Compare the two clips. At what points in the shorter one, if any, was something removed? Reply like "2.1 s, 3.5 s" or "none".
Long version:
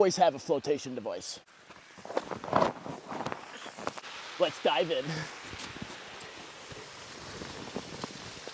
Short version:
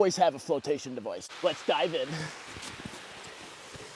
1.3 s